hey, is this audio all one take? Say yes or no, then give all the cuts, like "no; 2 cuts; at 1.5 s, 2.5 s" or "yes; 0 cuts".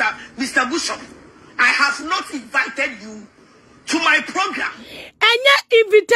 yes; 0 cuts